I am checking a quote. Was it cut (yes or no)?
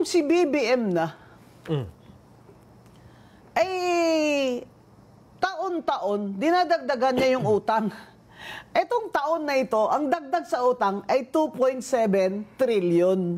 no